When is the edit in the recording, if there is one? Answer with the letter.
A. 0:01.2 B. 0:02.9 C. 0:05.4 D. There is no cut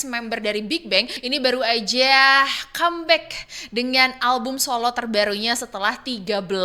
A